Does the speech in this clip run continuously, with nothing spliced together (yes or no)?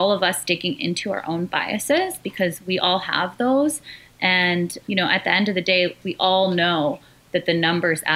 no